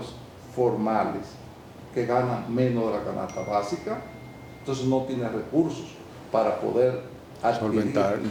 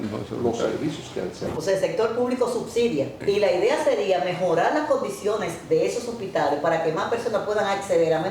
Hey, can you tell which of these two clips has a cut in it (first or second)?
second